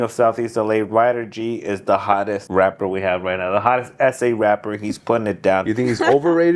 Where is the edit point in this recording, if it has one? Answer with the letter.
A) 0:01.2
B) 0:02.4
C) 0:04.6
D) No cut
B